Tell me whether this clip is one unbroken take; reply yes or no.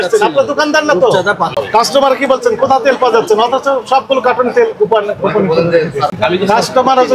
no